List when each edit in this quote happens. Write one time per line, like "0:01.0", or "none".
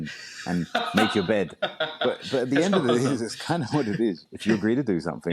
0:04.3